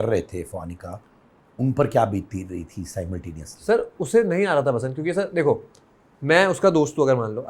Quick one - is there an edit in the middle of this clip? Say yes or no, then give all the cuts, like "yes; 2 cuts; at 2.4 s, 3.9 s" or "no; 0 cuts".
no; 0 cuts